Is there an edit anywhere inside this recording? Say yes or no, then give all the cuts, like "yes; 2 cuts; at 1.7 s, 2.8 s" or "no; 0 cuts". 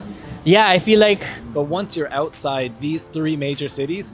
yes; 1 cut; at 1.4 s